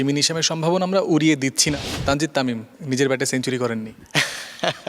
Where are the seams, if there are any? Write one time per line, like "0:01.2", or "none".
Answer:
0:01.7
0:02.7
0:04.0